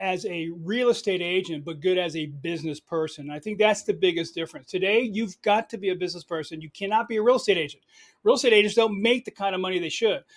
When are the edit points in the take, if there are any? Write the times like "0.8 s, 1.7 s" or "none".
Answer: none